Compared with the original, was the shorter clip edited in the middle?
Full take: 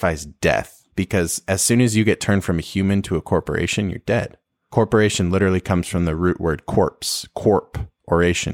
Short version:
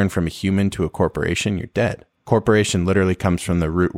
yes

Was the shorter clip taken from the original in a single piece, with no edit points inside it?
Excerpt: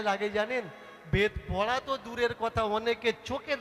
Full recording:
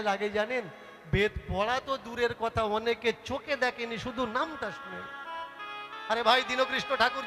yes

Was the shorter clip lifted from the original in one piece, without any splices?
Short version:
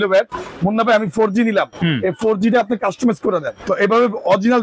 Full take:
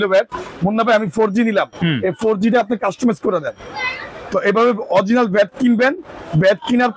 no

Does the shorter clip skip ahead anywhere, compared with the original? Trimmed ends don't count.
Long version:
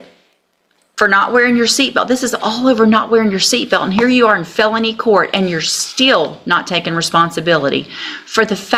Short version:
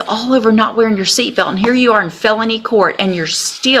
no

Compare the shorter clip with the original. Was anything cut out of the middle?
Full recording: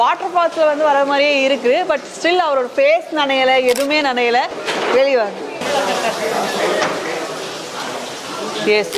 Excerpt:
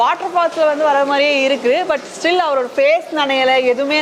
no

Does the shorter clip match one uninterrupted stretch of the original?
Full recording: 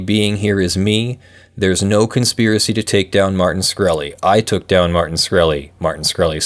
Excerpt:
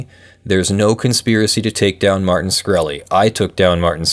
yes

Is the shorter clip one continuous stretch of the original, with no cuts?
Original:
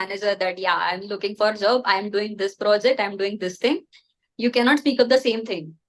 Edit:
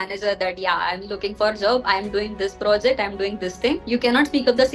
no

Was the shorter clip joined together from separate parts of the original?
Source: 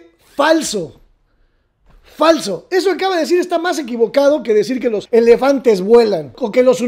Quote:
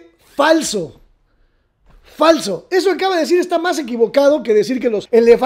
no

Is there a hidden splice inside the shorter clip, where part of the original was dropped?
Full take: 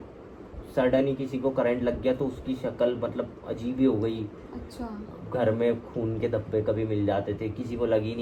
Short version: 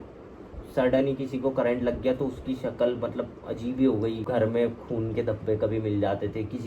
yes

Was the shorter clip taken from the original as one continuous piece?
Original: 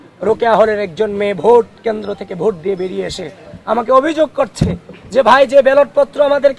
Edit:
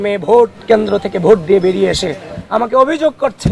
yes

